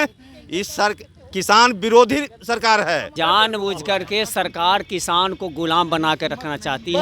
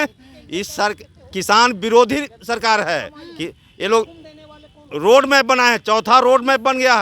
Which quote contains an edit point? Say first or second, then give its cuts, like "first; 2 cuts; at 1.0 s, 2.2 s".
first; 1 cut; at 3.1 s